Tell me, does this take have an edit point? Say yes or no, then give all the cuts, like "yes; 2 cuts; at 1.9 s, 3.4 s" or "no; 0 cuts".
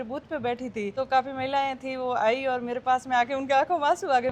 yes; 1 cut; at 0.9 s